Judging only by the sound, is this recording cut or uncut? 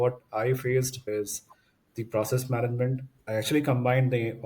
cut